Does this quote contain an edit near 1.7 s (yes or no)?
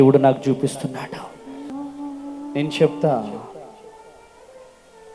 yes